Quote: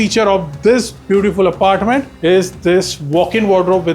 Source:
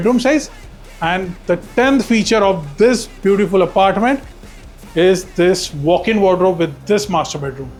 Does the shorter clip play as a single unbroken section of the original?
no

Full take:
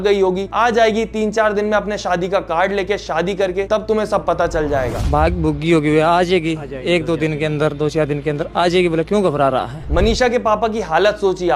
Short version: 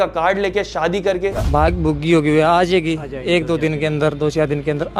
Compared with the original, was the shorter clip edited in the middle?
yes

